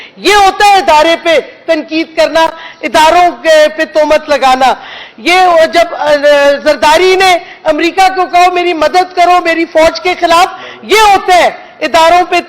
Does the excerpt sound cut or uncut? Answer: uncut